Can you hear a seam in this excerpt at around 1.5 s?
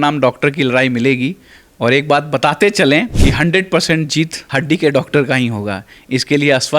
no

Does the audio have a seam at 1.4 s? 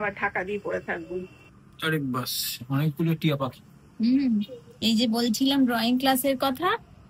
yes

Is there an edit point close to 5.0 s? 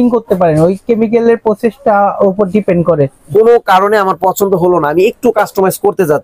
no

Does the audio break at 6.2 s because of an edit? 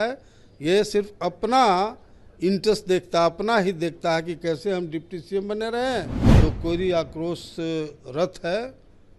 yes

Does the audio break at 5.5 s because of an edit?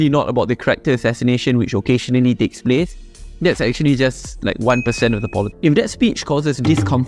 yes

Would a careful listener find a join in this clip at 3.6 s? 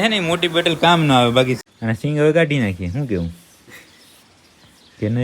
no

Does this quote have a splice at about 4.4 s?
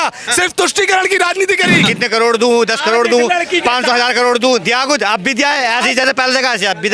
no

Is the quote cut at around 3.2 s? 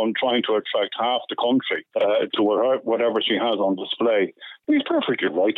no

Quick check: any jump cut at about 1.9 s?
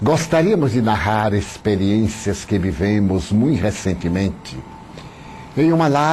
yes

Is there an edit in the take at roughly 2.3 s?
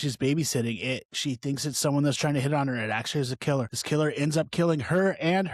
no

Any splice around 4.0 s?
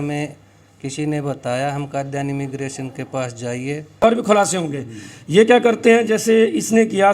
yes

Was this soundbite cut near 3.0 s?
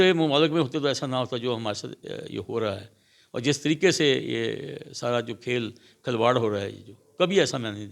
no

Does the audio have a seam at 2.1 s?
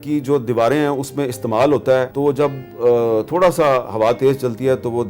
yes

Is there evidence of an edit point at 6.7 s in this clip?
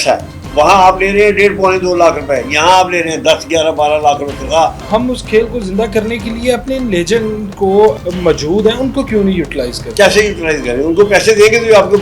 no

